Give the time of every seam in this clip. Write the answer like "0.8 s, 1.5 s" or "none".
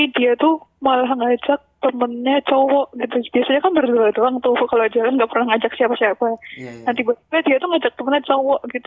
none